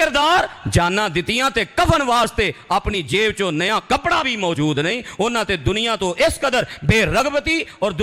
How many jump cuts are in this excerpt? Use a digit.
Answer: 0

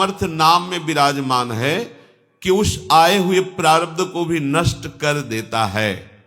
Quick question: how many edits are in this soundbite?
0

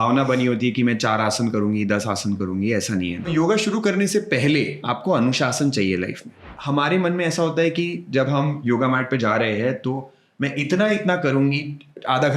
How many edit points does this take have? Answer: 4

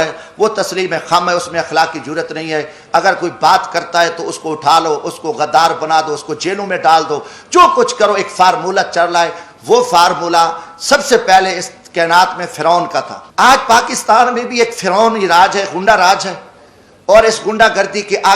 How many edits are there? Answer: 1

